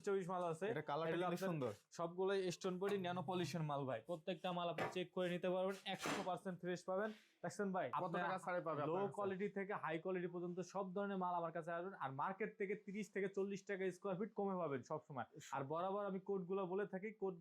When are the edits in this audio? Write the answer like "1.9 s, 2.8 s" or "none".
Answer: 7.9 s